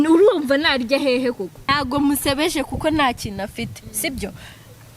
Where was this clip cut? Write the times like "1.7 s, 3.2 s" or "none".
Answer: 1.6 s